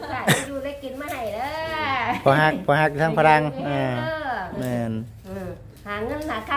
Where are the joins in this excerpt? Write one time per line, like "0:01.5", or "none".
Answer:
none